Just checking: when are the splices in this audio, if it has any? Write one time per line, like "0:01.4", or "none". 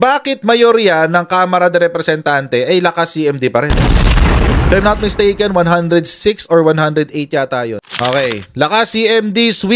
none